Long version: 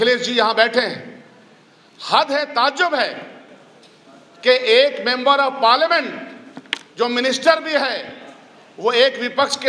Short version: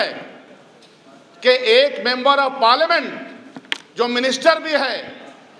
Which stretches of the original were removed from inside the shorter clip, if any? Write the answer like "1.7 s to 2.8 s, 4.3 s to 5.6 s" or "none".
none